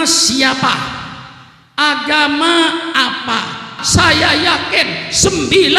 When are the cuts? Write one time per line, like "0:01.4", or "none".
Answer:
0:03.7